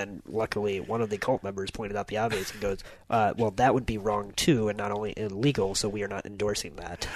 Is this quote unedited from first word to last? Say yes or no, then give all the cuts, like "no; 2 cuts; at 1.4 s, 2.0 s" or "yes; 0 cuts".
yes; 0 cuts